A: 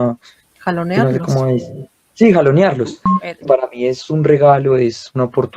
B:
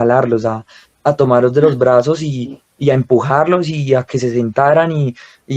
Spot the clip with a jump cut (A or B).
A